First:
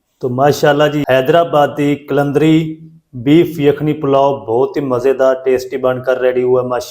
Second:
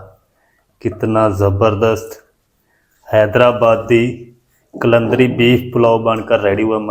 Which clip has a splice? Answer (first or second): first